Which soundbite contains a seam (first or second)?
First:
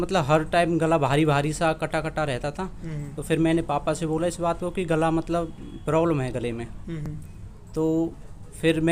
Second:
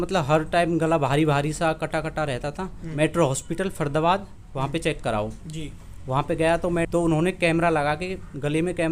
second